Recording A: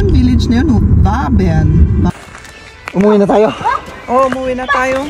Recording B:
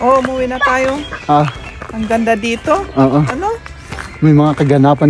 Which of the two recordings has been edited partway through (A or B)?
A